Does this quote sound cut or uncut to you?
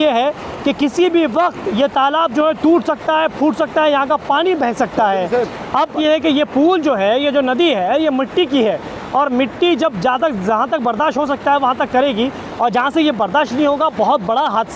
cut